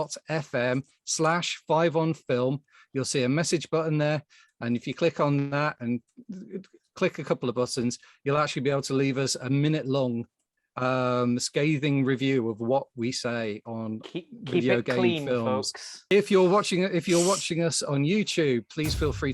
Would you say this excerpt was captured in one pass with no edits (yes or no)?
no